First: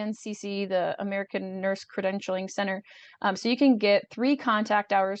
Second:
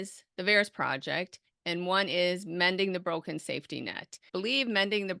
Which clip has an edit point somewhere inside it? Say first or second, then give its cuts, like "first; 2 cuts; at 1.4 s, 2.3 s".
second; 1 cut; at 4.2 s